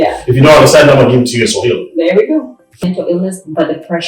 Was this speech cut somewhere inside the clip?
yes; 1 cut; at 2.8 s

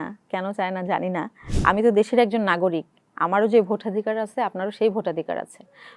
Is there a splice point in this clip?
yes; 1 cut; at 1.4 s

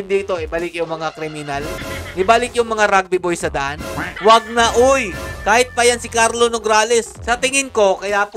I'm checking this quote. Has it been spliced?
yes; 3 cuts; at 1.8 s, 4.0 s, 7.2 s

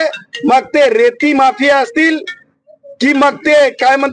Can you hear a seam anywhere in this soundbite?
no; 0 cuts

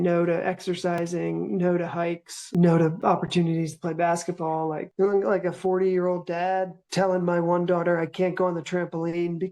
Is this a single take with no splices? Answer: no; 1 cut; at 4.8 s

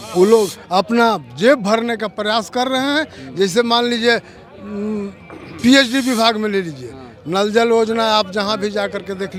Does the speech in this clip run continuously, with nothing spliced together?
yes; 0 cuts

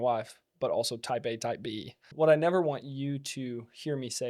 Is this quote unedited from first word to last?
no; 1 cut; at 2.1 s

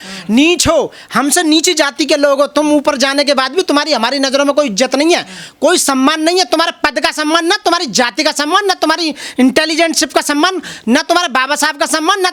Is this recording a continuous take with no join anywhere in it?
yes; 0 cuts

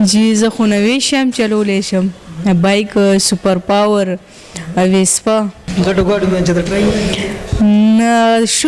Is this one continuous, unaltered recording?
no; 1 cut; at 5.7 s

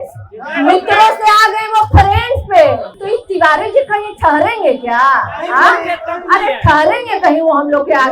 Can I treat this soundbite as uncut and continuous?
no; 1 cut; at 2.9 s

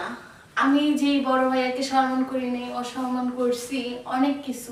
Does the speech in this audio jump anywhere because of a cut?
no; 0 cuts

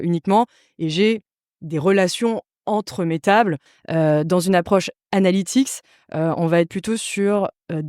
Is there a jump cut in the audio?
yes; 1 cut; at 3.7 s

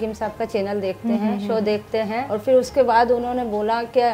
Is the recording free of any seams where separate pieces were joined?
no; 1 cut; at 2.3 s

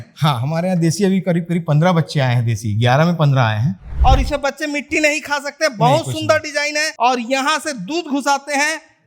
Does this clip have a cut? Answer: yes; 2 cuts; at 3.9 s, 6.9 s

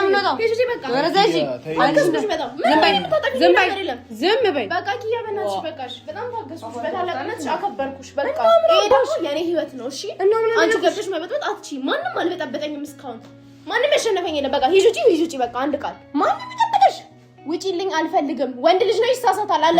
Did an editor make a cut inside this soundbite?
no; 0 cuts

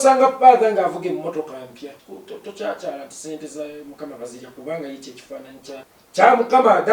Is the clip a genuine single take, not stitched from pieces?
no; 2 cuts; at 2.0 s, 6.0 s

